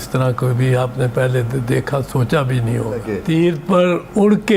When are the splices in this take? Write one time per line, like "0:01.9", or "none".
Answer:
0:03.1